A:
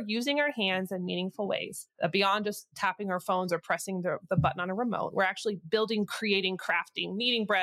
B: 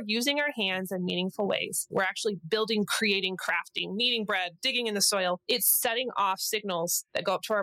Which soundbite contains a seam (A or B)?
B